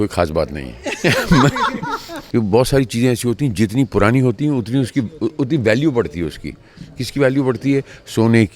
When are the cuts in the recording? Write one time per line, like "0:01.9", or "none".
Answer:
0:02.1